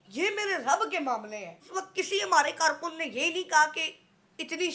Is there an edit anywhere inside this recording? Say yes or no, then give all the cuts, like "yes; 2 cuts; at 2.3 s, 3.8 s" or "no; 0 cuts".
yes; 1 cut; at 1.8 s